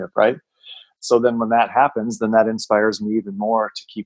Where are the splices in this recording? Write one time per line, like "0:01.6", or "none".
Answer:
0:00.9